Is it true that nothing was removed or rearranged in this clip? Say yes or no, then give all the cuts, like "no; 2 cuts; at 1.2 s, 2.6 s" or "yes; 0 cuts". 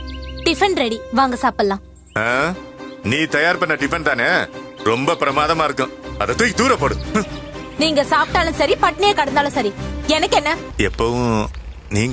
no; 1 cut; at 10.7 s